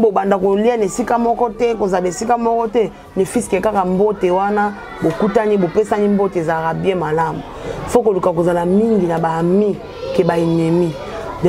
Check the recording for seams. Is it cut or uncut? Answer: uncut